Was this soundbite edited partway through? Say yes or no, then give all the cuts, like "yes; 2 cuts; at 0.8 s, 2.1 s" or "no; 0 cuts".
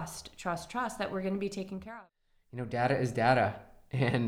yes; 1 cut; at 1.9 s